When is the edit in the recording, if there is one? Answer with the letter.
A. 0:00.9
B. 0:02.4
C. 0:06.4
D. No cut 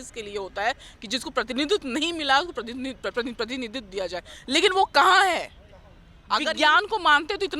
C